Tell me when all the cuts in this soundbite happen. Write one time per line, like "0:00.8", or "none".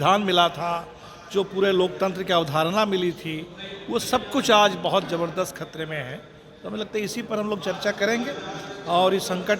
none